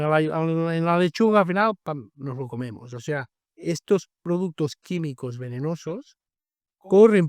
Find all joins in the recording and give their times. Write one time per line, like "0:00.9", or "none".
none